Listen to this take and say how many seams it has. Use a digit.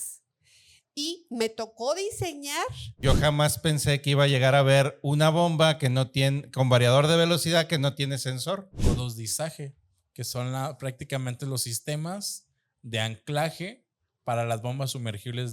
2